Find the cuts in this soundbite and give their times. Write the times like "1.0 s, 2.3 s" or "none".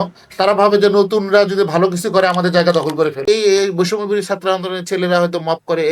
3.3 s